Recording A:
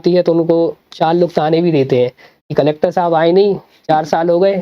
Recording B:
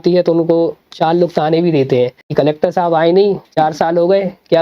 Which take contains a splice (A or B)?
B